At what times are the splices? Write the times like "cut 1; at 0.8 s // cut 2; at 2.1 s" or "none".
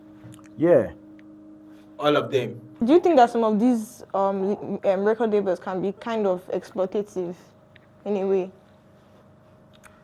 cut 1; at 2.6 s